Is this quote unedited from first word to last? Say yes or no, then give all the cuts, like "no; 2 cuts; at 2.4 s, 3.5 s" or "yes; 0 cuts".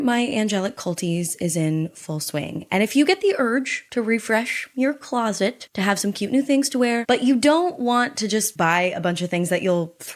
yes; 0 cuts